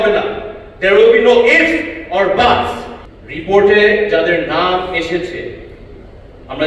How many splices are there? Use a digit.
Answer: 1